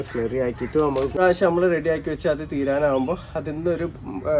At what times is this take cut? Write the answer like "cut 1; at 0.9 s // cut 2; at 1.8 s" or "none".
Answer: cut 1; at 1.2 s